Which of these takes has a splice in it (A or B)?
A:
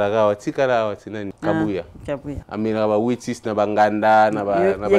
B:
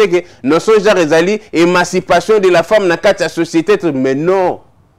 A